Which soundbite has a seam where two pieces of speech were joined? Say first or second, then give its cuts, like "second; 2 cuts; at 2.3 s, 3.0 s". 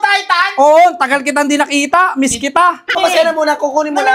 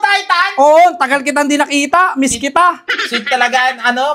first; 1 cut; at 3.0 s